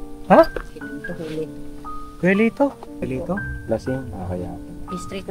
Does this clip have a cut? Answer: yes; 1 cut; at 3.1 s

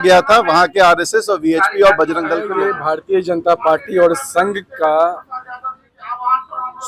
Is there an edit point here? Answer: yes; 1 cut; at 2.5 s

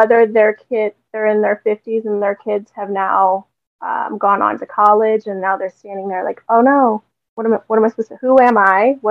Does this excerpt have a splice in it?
no; 0 cuts

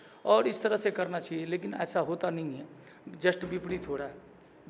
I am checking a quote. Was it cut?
no; 0 cuts

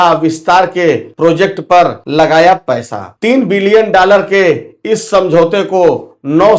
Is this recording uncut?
no; 2 cuts; at 1.1 s, 2.0 s

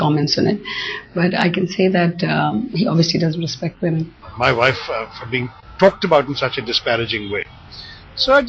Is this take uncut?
no; 1 cut; at 4.2 s

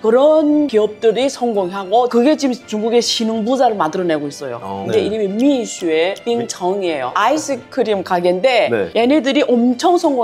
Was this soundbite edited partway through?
yes; 2 cuts; at 5.0 s, 7.1 s

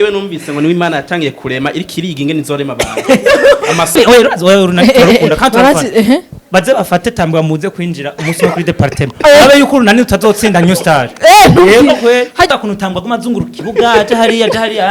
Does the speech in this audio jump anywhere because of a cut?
yes; 2 cuts; at 4.0 s, 12.5 s

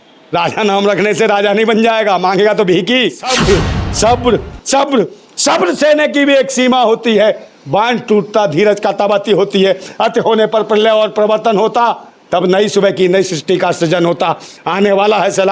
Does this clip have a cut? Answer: yes; 1 cut; at 3.3 s

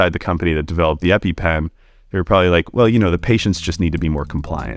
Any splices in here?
no; 0 cuts

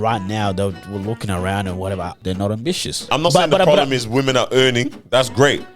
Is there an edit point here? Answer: yes; 2 cuts; at 2.2 s, 3.1 s

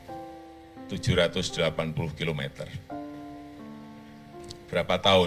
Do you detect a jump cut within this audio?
yes; 1 cut; at 1.0 s

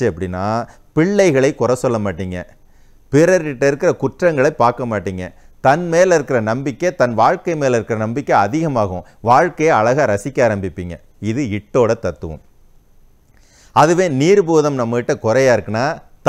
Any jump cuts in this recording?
no; 0 cuts

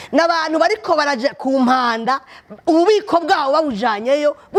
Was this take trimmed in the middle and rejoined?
no; 0 cuts

